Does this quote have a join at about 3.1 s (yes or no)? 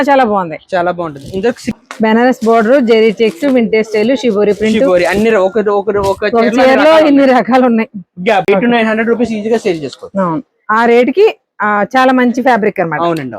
no